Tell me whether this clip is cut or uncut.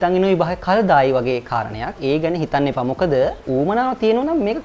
uncut